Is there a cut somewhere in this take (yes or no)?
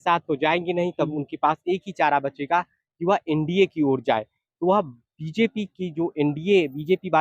no